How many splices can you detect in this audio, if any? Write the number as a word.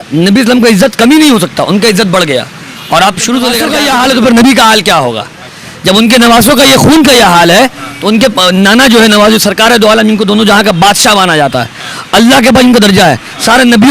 one